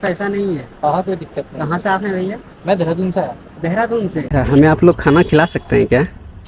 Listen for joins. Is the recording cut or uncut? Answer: cut